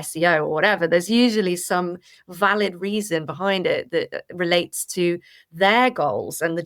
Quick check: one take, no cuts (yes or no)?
yes